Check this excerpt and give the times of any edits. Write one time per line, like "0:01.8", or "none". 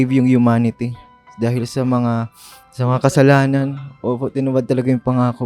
none